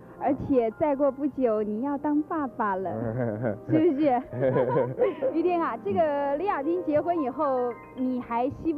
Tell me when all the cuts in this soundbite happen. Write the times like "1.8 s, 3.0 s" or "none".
5.2 s